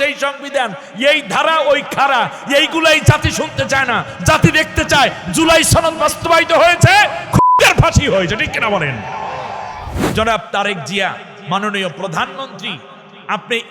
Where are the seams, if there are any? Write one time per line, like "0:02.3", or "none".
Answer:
0:09.9